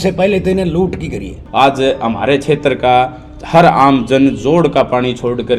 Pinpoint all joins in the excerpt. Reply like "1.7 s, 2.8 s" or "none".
1.4 s